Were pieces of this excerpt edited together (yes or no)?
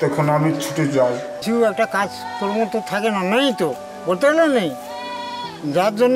yes